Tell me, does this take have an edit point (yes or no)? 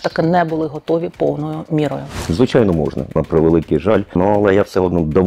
yes